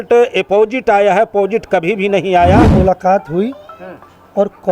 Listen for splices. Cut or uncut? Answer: cut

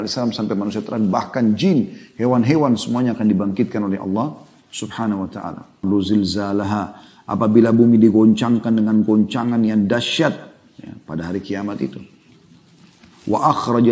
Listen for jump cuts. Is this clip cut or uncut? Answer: cut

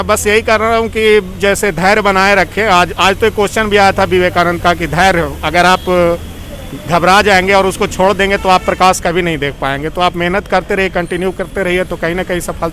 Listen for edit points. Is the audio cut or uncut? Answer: uncut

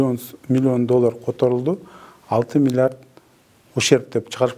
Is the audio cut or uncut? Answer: uncut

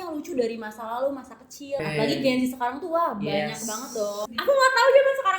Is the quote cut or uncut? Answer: cut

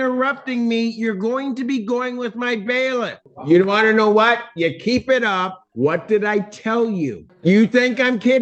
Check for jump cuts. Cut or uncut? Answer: cut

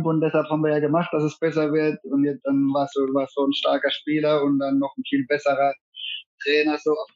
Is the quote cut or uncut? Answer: uncut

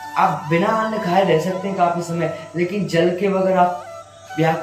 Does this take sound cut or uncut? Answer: uncut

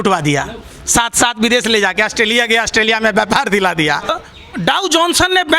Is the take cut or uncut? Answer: cut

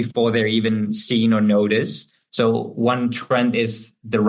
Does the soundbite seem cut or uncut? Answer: cut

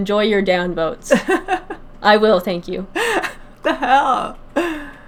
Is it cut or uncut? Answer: uncut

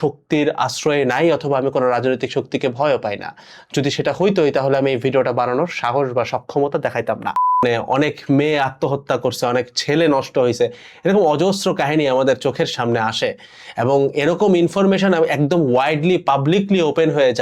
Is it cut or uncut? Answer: cut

